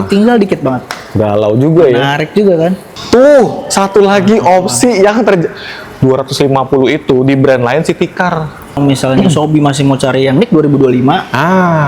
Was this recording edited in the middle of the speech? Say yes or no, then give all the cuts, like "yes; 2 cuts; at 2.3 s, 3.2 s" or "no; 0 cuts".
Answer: yes; 2 cuts; at 2.9 s, 8.8 s